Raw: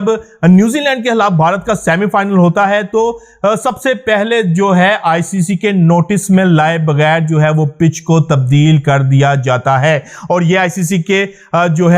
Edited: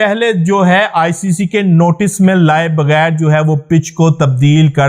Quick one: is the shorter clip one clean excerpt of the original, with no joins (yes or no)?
yes